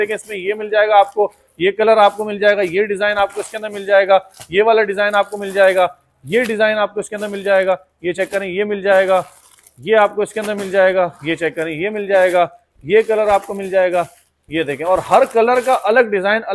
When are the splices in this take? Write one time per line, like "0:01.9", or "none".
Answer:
none